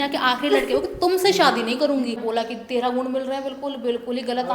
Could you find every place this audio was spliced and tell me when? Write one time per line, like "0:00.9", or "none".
0:02.2

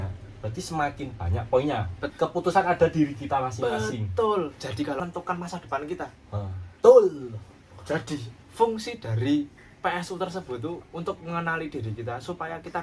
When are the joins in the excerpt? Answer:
0:02.0
0:05.0

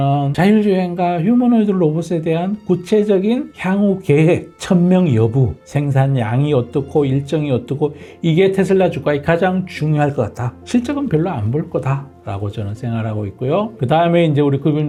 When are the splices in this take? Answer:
none

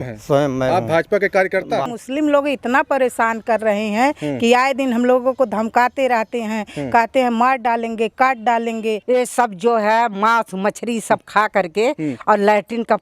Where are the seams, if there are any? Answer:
0:01.9
0:09.0

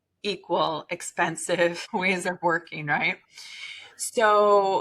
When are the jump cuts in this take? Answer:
0:01.8

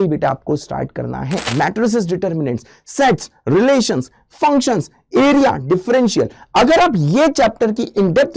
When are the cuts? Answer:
0:01.5

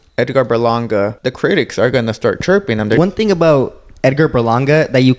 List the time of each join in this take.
0:01.2
0:03.0

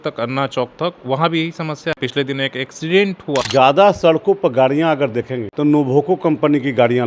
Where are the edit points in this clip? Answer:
0:02.0
0:03.5
0:05.4

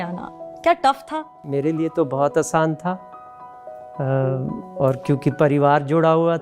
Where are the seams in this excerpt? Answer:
0:01.4

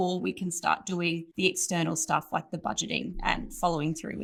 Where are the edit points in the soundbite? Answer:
none

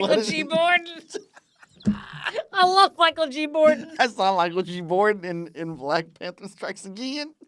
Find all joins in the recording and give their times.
none

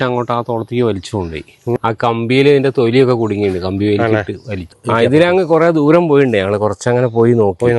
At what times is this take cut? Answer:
0:01.8
0:04.8

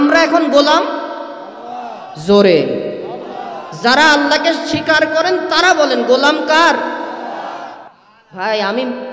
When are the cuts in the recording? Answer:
0:07.8

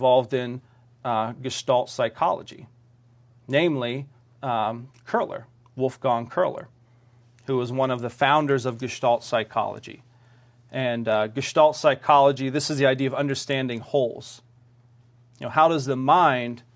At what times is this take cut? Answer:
0:07.9

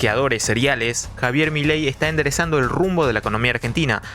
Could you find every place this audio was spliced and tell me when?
0:01.1

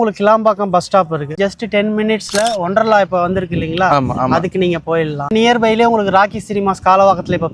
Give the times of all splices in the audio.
0:01.3
0:05.3

